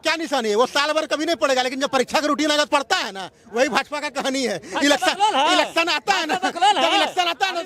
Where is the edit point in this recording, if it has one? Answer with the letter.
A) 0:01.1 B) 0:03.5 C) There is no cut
C